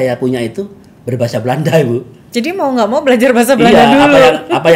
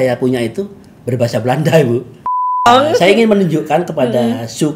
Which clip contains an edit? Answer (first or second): second